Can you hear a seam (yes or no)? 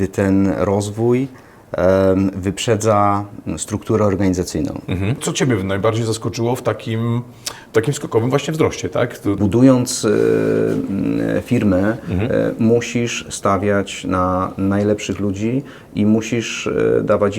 yes